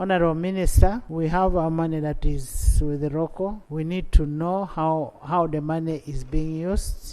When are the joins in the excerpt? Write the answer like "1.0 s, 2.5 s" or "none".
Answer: 1.0 s, 3.6 s